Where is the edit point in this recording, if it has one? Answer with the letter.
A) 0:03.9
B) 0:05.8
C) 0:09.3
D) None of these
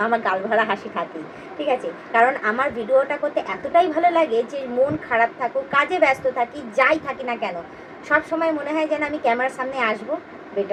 D